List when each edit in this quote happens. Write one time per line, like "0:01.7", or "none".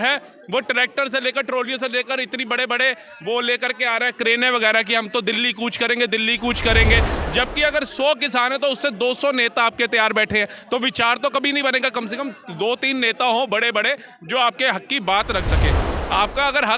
none